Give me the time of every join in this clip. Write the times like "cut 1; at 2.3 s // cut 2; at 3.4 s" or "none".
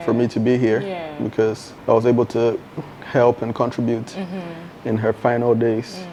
none